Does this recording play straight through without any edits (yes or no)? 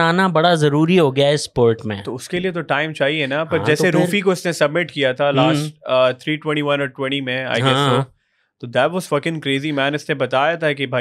yes